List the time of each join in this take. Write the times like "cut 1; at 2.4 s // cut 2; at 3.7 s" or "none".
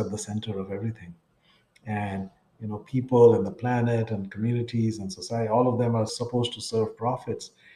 cut 1; at 6.1 s